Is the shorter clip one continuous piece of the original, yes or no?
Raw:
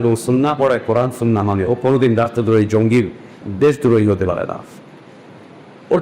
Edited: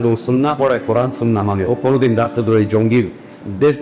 yes